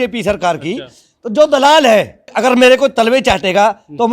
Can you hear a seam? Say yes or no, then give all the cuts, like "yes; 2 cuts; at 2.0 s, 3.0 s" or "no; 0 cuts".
yes; 1 cut; at 2.3 s